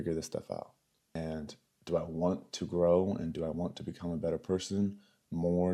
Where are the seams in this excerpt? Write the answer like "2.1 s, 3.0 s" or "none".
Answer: 1.2 s